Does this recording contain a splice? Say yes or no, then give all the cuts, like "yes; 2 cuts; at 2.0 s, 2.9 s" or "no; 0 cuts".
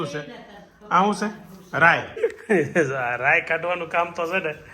yes; 1 cut; at 2.1 s